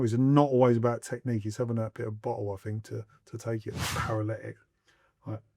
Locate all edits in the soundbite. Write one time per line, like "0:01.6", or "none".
0:03.8